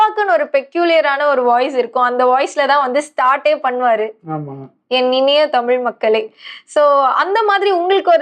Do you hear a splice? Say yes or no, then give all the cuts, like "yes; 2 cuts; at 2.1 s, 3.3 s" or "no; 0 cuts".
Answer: no; 0 cuts